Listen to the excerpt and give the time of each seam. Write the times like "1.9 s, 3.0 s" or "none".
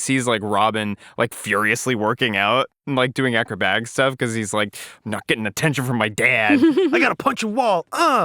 7.0 s